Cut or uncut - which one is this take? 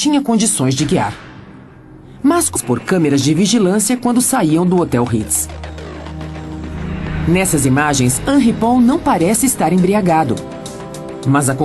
uncut